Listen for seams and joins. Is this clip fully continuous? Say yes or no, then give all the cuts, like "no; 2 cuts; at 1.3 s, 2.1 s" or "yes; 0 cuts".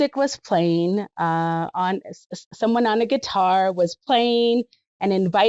yes; 0 cuts